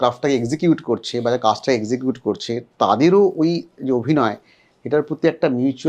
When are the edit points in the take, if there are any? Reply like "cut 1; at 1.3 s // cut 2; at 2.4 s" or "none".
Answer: none